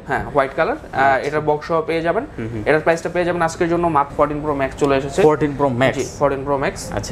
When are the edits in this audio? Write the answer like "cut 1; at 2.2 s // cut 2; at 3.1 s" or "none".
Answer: cut 1; at 4.1 s